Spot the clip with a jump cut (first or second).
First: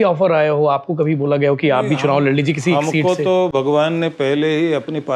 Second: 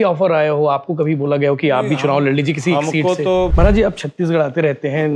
second